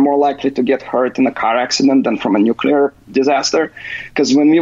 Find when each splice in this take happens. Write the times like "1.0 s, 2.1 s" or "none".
none